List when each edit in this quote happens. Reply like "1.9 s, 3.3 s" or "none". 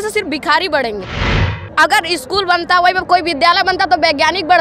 1.5 s